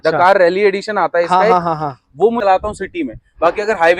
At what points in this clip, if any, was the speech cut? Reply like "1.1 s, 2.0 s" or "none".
2.4 s